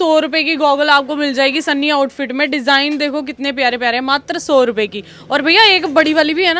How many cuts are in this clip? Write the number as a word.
zero